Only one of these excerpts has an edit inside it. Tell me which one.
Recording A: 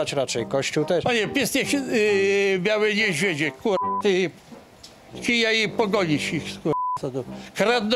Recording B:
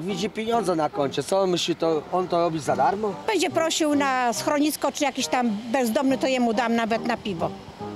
B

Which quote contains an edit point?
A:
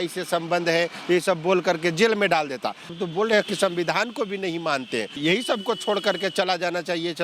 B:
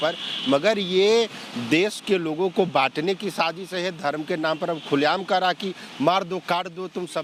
A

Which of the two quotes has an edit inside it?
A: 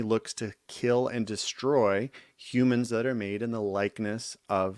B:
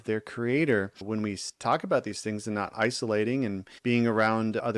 B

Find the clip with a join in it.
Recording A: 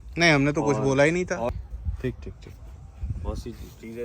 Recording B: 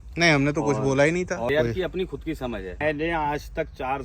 B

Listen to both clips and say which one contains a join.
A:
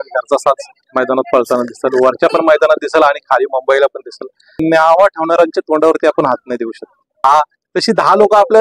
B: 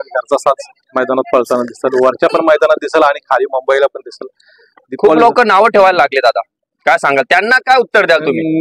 A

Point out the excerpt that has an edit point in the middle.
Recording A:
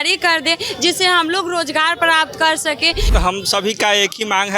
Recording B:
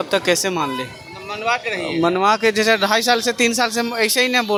A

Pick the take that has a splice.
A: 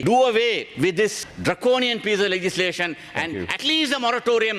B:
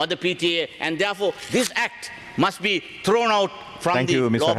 A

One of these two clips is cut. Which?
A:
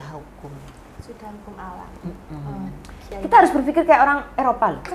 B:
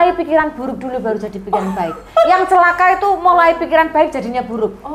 A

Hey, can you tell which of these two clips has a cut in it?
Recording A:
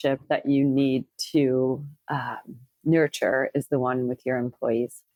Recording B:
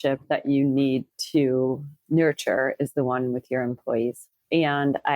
B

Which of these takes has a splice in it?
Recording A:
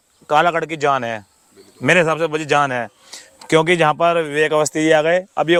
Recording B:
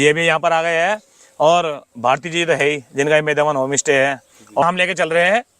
B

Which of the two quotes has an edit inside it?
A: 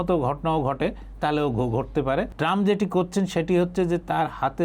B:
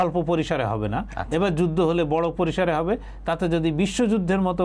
A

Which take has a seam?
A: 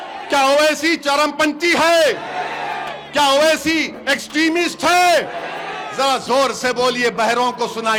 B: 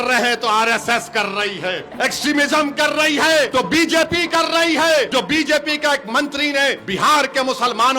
B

